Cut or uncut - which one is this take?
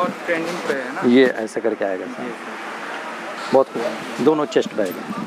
cut